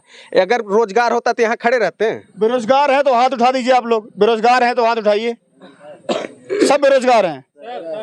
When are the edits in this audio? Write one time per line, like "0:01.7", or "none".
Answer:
none